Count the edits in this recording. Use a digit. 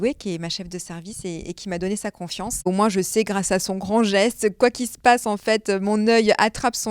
1